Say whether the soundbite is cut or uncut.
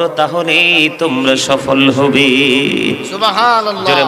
uncut